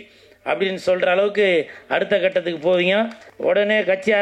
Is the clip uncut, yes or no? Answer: no